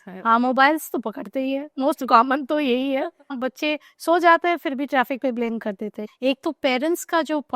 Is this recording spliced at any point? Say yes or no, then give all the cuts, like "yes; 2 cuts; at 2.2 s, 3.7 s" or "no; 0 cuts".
yes; 2 cuts; at 3.3 s, 6.0 s